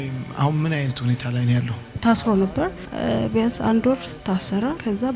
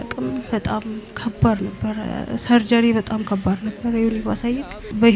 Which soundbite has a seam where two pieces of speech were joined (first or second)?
first